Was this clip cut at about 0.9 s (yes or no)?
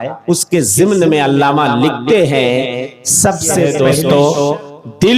no